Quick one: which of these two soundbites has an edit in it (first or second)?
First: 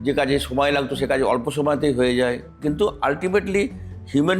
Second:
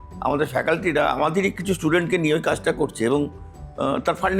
first